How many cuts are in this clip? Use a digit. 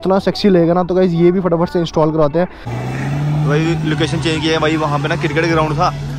1